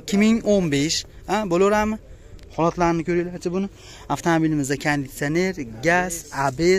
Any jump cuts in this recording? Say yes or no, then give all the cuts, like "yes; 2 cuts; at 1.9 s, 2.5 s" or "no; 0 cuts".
no; 0 cuts